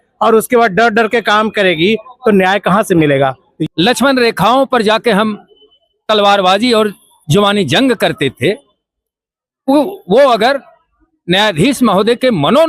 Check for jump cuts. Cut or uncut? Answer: cut